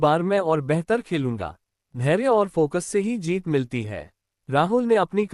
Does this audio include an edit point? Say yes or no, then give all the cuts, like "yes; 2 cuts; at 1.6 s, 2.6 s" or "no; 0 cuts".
yes; 1 cut; at 1.8 s